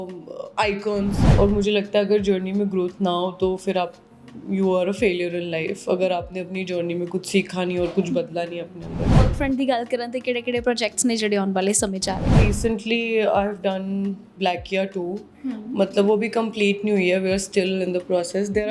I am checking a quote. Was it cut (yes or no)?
yes